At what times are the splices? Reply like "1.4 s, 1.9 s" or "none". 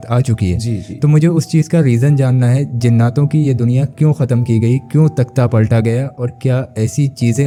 none